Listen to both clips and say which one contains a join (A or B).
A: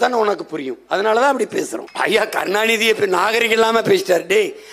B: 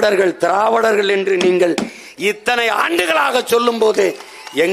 A